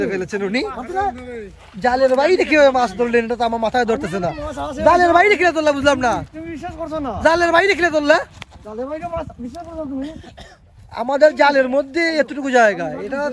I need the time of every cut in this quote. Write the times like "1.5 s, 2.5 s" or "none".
none